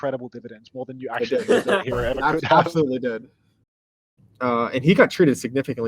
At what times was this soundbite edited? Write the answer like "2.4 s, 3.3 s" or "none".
4.0 s